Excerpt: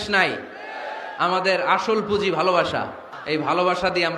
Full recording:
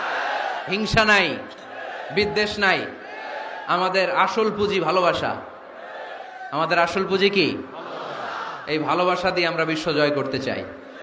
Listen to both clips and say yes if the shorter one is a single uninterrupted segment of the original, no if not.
no